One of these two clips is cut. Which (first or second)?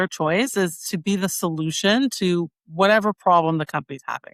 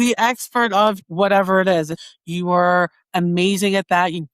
second